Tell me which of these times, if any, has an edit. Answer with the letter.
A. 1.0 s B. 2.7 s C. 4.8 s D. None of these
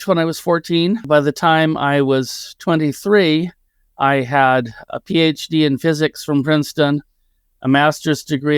A